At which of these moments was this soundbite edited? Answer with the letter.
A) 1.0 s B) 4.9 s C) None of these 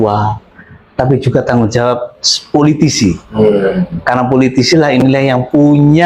C